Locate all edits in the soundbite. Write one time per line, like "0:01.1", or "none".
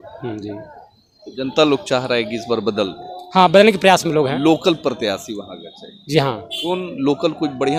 none